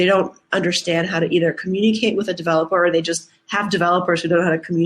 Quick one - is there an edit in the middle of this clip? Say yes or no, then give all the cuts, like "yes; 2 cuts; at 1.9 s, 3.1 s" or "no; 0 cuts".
no; 0 cuts